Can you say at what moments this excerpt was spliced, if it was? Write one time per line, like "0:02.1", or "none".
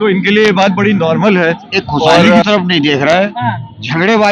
0:02.2